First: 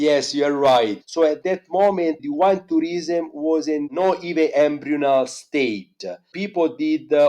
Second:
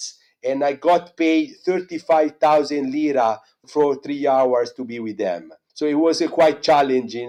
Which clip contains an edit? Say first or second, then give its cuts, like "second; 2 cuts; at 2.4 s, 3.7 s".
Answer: first; 3 cuts; at 1.0 s, 2.2 s, 3.9 s